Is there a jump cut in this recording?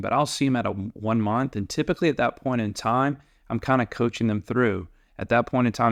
no; 0 cuts

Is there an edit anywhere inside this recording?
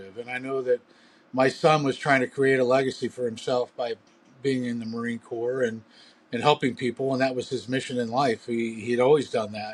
no; 0 cuts

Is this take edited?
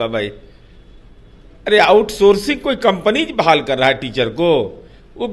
no; 0 cuts

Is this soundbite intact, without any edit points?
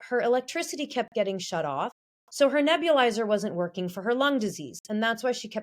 yes; 0 cuts

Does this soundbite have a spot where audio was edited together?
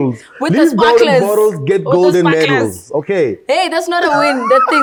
no; 0 cuts

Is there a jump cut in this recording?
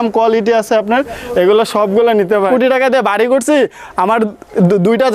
yes; 1 cut; at 2.5 s

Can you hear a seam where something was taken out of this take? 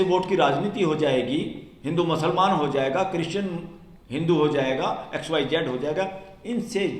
no; 0 cuts

